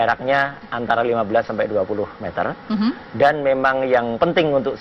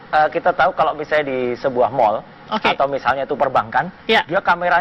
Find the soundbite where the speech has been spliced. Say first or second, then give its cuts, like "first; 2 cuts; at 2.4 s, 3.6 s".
second; 1 cut; at 3.5 s